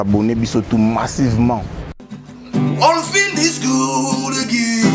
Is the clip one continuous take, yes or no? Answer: no